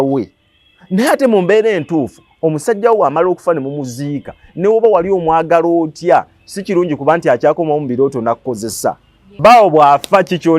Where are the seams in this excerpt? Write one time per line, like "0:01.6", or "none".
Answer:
0:09.4